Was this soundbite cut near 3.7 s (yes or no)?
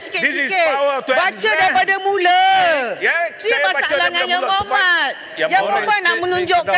no